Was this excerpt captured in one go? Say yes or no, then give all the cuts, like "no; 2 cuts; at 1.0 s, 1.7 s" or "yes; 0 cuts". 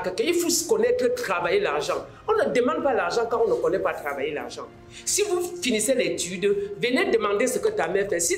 yes; 0 cuts